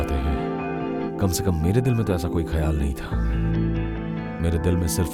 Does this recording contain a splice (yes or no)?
no